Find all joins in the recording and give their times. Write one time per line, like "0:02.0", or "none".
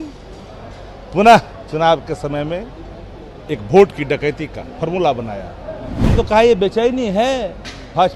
0:06.1